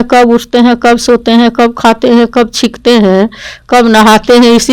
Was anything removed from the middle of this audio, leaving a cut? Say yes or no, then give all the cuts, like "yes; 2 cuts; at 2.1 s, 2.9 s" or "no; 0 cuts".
no; 0 cuts